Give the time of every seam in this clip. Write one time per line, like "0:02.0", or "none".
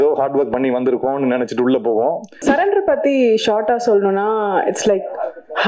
0:02.4